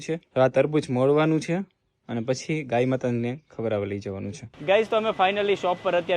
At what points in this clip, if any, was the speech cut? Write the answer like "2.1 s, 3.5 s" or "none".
4.6 s